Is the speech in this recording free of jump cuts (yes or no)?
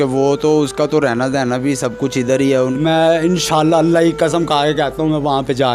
no